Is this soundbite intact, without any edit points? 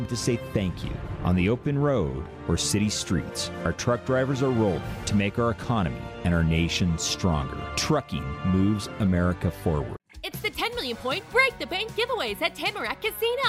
no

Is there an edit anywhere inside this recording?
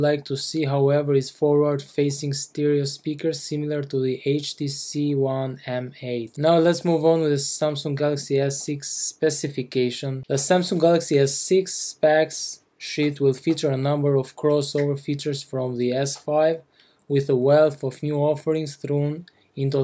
yes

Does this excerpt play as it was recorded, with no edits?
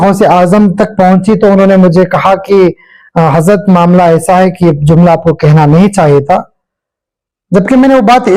yes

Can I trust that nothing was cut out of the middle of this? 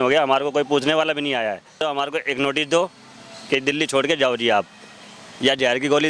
no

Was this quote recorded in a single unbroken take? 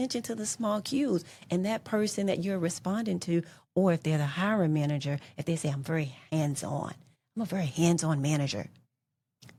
yes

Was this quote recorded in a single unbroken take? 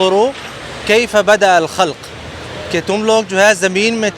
yes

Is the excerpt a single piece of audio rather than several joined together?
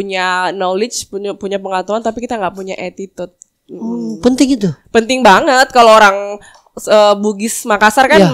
yes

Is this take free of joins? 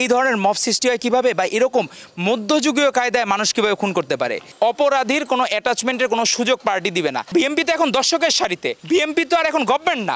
no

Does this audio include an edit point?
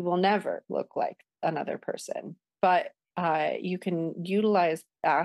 yes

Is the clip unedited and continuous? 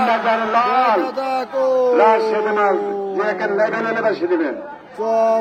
yes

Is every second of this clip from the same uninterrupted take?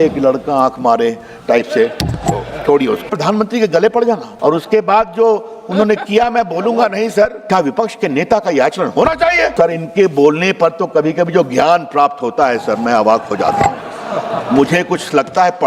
no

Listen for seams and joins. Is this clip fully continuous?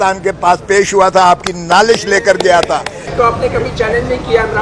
no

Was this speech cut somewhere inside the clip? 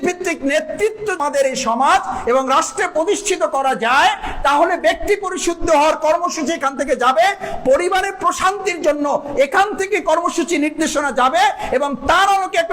yes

